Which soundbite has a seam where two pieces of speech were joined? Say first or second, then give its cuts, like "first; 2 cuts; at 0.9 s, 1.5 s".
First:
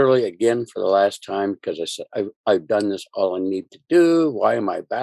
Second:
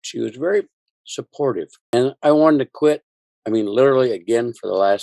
second; 1 cut; at 1.8 s